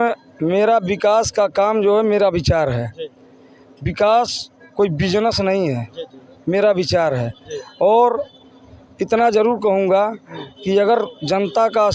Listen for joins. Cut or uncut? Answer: uncut